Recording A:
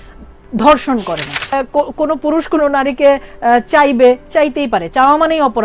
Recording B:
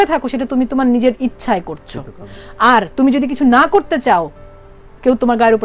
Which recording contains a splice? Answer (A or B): A